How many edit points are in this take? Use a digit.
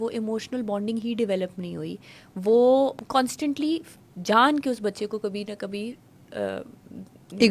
1